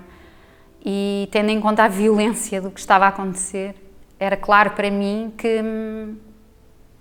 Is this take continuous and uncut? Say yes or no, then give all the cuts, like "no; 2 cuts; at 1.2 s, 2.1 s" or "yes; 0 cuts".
yes; 0 cuts